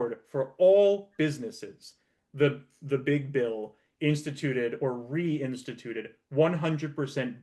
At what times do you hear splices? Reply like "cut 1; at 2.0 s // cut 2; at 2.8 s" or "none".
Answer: none